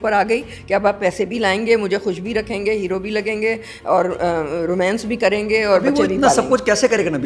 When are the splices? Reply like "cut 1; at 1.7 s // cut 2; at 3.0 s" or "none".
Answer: none